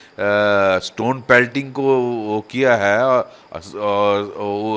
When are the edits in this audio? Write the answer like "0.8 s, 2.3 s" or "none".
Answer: none